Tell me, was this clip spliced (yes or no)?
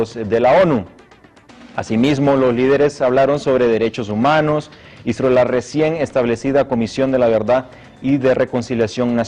no